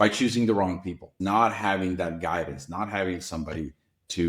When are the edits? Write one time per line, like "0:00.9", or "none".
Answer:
0:01.1